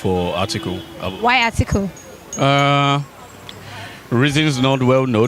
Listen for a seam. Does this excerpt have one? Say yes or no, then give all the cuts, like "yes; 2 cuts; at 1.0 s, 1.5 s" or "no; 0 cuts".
no; 0 cuts